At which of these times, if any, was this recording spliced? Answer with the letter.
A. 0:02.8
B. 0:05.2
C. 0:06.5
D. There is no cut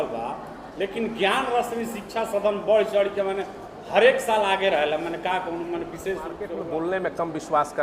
C